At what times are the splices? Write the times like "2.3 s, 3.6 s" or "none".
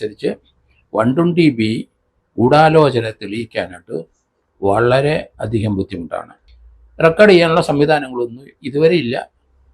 6.5 s